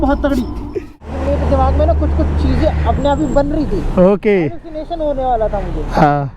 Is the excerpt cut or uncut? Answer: cut